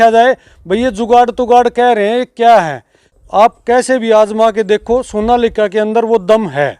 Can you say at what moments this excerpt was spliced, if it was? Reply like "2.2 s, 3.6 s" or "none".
3.1 s